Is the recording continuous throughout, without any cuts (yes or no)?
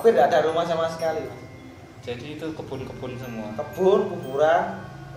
yes